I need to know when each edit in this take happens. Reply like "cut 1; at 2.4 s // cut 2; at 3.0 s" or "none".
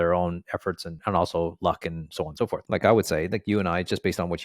cut 1; at 0.9 s // cut 2; at 2.6 s